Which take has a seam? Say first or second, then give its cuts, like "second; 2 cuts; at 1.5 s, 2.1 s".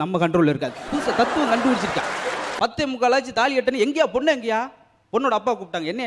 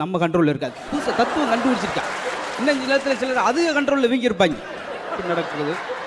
first; 1 cut; at 2.5 s